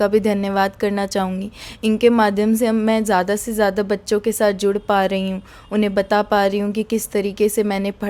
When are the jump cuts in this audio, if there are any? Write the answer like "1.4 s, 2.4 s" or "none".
none